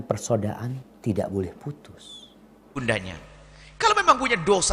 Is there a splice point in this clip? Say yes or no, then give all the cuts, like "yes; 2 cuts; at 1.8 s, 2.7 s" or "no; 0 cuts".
yes; 1 cut; at 2.8 s